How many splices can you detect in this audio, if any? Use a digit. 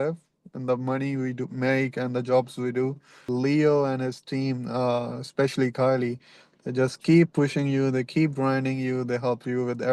1